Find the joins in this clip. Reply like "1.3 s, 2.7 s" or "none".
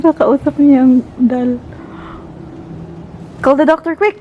none